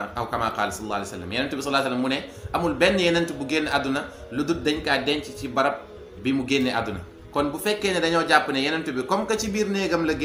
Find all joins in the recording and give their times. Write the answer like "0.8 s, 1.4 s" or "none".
none